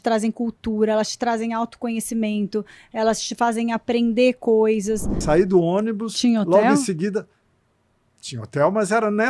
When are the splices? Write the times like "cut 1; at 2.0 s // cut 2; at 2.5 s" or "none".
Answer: cut 1; at 5.2 s